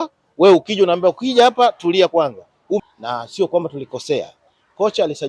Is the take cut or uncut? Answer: cut